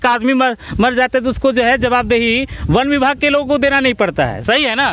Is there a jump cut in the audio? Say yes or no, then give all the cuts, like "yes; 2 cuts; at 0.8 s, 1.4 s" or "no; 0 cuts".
no; 0 cuts